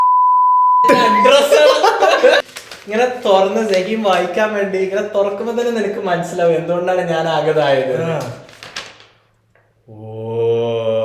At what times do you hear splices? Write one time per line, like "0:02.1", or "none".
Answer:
0:02.4